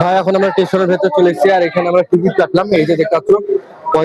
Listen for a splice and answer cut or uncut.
uncut